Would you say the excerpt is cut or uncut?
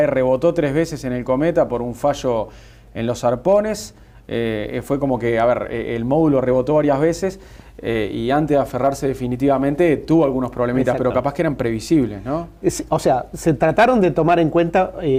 uncut